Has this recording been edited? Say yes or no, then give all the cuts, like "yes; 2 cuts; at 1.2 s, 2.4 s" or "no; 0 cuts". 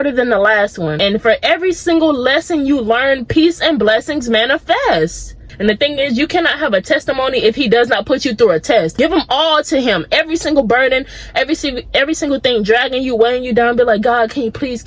yes; 3 cuts; at 1.0 s, 5.4 s, 9.0 s